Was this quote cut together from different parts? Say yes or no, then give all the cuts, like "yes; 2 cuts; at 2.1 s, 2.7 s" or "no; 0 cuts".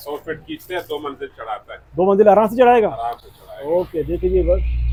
no; 0 cuts